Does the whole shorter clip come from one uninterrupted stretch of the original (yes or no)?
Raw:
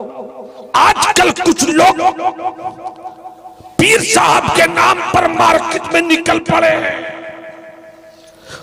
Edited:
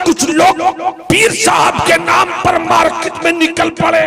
no